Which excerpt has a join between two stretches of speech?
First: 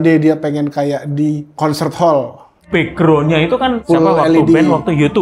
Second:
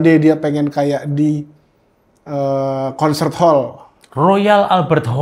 first; 2 cuts; at 1.5 s, 2.6 s

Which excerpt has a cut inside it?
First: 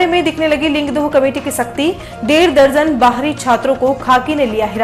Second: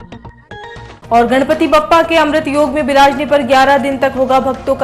second; 1 cut; at 1.0 s

